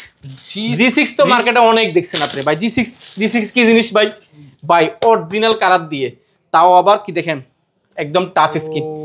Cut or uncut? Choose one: uncut